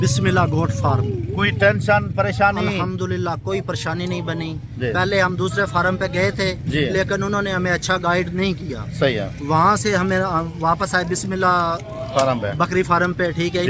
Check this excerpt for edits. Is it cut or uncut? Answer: uncut